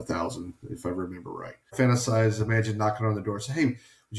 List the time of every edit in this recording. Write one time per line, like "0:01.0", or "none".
0:01.7